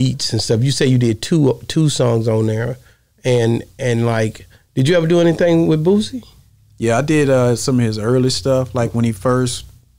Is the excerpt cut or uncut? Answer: uncut